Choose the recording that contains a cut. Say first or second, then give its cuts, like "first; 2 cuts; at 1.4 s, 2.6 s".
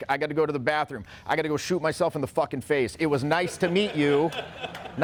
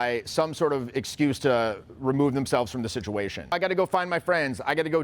second; 1 cut; at 3.5 s